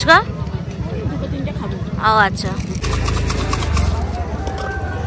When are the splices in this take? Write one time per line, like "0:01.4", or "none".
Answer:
0:02.8